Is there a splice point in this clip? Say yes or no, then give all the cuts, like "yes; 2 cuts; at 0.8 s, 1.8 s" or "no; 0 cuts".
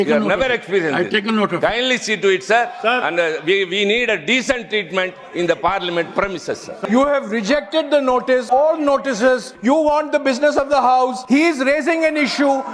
yes; 4 cuts; at 6.7 s, 8.4 s, 9.5 s, 11.2 s